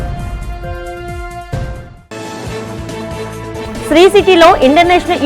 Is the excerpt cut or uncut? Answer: cut